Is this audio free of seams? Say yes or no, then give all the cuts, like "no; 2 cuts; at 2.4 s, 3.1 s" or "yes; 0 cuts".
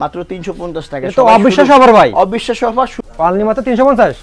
no; 1 cut; at 3.0 s